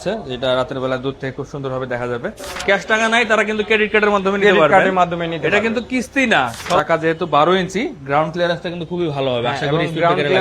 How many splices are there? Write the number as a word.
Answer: two